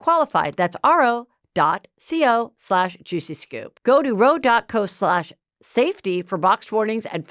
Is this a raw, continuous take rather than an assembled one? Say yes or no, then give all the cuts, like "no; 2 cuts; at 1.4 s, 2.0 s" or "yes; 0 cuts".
yes; 0 cuts